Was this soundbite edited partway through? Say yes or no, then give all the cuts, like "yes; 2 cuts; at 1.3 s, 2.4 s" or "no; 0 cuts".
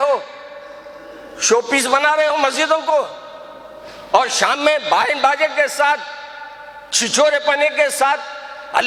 no; 0 cuts